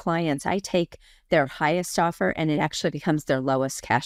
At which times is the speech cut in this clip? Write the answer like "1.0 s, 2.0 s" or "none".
none